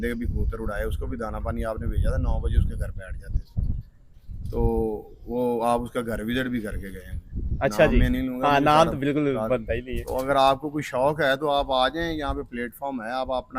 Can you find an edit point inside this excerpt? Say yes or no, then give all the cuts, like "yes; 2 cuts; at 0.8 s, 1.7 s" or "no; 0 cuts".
no; 0 cuts